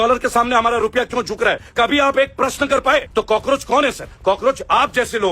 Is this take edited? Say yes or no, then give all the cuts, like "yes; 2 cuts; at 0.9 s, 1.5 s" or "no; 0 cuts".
yes; 3 cuts; at 1.6 s, 3.1 s, 4.1 s